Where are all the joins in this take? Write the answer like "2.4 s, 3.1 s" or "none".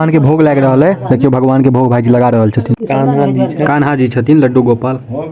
2.8 s